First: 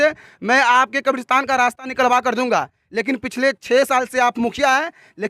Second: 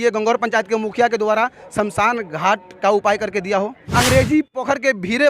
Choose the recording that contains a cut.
second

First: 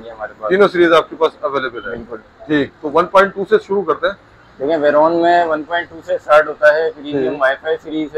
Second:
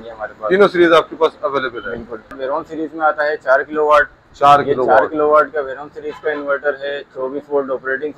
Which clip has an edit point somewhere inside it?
second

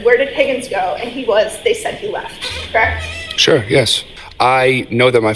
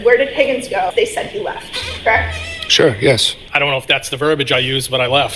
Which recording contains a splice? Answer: second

